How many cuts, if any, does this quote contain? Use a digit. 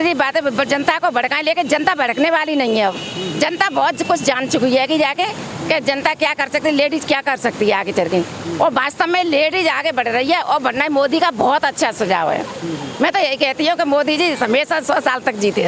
0